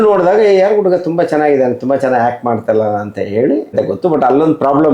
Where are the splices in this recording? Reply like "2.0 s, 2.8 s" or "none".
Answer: 3.7 s